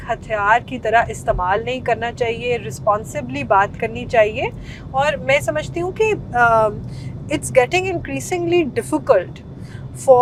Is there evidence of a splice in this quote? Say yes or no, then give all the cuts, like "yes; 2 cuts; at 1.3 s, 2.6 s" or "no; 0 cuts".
no; 0 cuts